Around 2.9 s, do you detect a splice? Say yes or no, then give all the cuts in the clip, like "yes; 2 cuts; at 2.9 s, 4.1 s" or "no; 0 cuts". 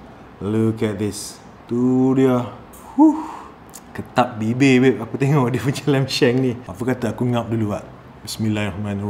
no; 2 cuts; at 1.6 s, 6.7 s